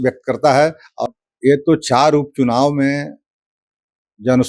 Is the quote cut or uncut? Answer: cut